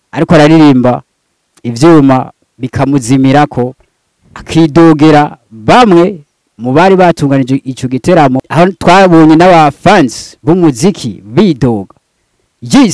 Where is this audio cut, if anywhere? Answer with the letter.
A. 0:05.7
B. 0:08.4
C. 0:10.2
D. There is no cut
B